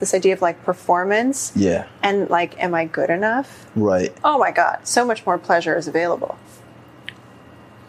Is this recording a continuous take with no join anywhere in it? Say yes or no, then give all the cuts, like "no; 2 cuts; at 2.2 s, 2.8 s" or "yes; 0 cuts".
no; 2 cuts; at 4.2 s, 6.4 s